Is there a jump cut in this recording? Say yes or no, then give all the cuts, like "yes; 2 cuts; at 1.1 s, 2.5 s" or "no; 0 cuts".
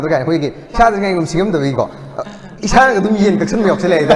no; 0 cuts